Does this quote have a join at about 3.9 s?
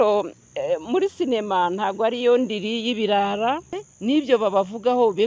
yes; 1 cut; at 3.9 s

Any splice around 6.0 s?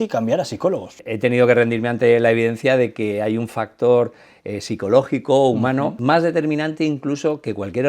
yes; 2 cuts; at 1.0 s, 6.0 s

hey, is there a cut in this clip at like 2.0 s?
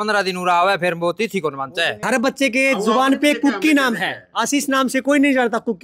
yes; 1 cut; at 2.0 s

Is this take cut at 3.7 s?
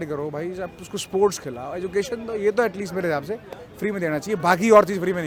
no; 0 cuts

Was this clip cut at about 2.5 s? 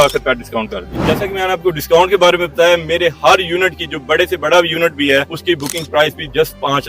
no; 2 cuts; at 1.0 s, 5.3 s

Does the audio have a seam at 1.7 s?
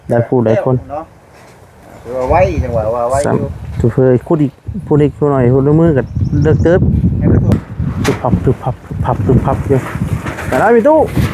no; 1 cut; at 7.5 s

